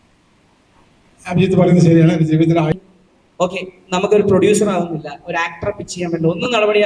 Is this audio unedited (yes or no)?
no